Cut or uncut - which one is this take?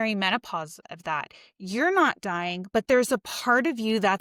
uncut